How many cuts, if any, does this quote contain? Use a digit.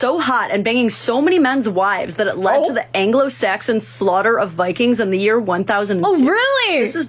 0